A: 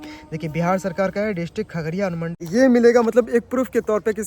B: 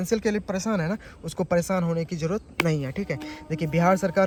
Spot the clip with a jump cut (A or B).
A